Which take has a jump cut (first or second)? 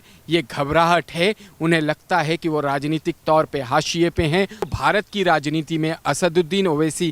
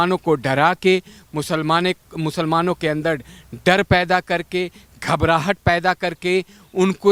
first